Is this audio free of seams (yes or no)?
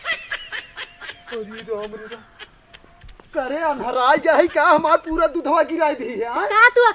no